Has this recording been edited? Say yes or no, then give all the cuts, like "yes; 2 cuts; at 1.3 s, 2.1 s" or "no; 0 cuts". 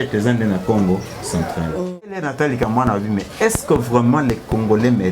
yes; 1 cut; at 2.3 s